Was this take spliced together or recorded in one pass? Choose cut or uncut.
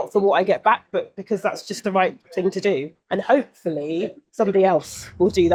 uncut